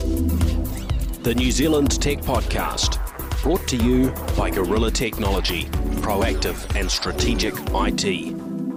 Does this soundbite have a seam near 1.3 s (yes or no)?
no